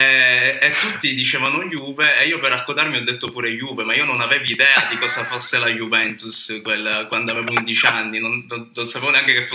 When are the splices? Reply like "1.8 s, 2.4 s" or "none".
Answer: none